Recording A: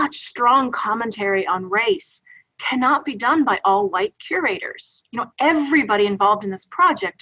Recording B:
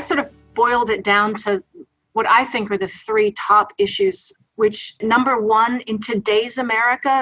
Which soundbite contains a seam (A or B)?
B